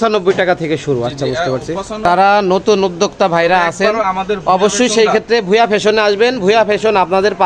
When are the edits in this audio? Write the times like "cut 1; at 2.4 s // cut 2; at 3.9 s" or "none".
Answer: cut 1; at 2.0 s